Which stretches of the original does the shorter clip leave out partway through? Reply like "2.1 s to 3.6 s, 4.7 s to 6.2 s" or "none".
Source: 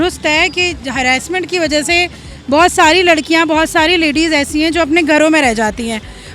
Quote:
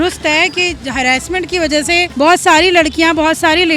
2.1 s to 2.4 s